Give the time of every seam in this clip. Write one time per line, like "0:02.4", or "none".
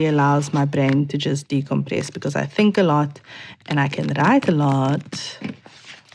none